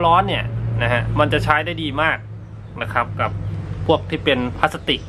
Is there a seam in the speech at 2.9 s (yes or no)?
no